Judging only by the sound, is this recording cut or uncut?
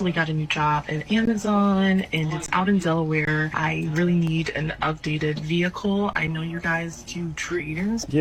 uncut